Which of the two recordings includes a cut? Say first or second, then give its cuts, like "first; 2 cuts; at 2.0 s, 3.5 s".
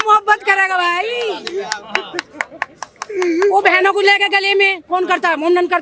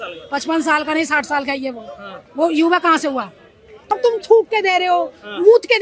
second; 1 cut; at 3.7 s